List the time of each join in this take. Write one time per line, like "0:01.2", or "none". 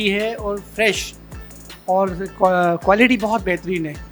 0:01.4